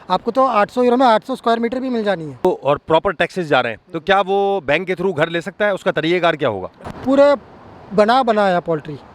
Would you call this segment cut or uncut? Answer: cut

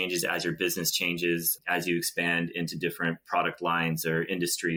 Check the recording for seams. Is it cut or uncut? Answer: uncut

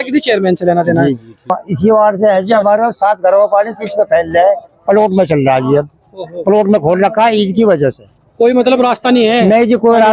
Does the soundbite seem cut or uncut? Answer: cut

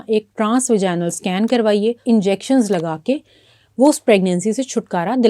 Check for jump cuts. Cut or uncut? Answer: cut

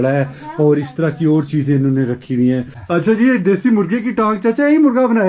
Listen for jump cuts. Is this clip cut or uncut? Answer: cut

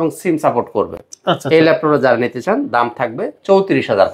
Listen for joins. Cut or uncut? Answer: uncut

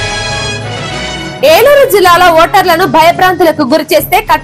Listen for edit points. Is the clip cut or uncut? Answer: uncut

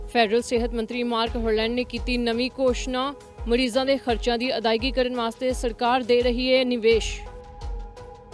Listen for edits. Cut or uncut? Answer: cut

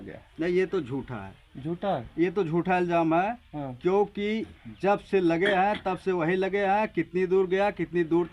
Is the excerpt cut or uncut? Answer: uncut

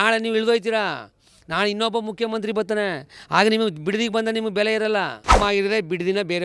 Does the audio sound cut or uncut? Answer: cut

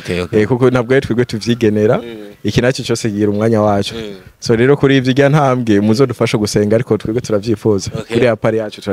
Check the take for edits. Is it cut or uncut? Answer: uncut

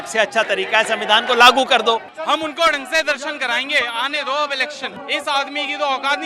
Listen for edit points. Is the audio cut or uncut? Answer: cut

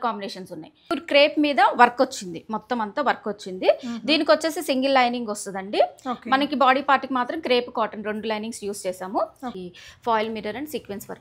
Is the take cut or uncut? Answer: cut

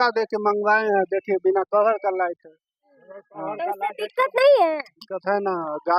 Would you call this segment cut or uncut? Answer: uncut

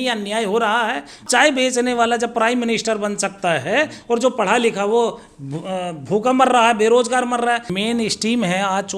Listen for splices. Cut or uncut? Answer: cut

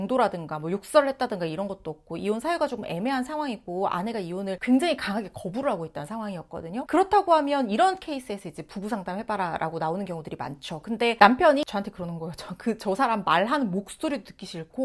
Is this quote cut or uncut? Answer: uncut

